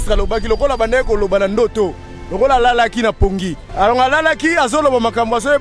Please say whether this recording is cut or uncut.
cut